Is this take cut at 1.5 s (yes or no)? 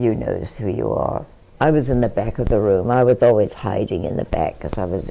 yes